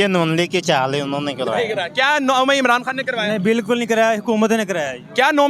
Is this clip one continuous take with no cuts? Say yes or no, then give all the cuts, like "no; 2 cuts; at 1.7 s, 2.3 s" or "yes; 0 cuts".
yes; 0 cuts